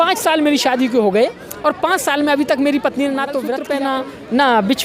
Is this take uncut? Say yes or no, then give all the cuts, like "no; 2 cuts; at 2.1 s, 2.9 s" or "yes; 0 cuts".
no; 1 cut; at 3.6 s